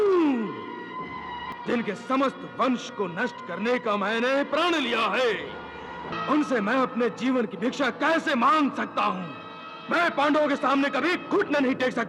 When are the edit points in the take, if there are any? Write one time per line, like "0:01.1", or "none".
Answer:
0:01.5
0:06.1